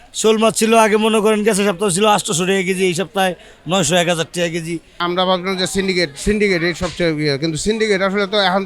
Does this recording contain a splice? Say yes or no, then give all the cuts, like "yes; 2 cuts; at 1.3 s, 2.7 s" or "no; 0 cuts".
yes; 1 cut; at 5.0 s